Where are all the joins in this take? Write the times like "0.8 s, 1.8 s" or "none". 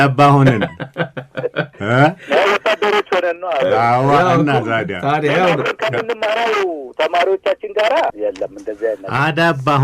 1.7 s, 8.1 s